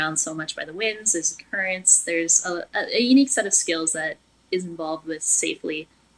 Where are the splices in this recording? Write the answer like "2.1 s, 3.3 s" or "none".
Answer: none